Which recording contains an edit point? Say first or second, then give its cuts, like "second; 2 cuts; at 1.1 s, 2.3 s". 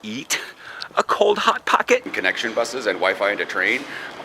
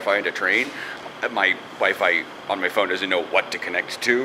first; 1 cut; at 2.1 s